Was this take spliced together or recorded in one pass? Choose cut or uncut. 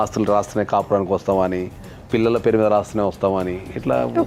uncut